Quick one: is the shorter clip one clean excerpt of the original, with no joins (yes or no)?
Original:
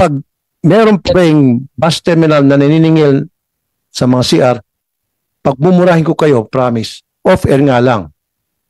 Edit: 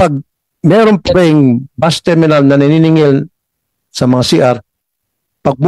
yes